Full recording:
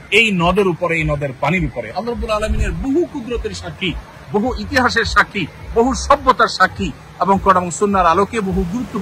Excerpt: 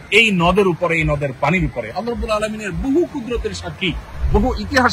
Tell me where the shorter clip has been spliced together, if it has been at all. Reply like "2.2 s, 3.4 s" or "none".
none